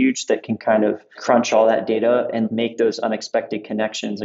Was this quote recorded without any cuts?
no; 2 cuts; at 1.2 s, 2.5 s

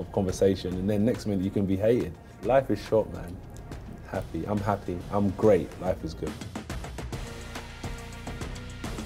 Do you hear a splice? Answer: yes; 2 cuts; at 2.3 s, 6.3 s

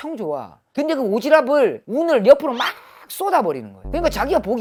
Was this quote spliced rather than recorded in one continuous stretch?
no; 0 cuts

